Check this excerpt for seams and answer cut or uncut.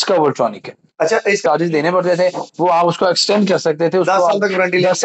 cut